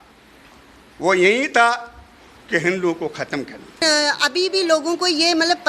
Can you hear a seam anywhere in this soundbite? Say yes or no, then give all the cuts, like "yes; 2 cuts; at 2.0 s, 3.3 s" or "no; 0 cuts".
yes; 1 cut; at 3.8 s